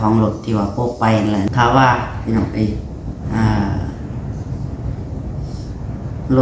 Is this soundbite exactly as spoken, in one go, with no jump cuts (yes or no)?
no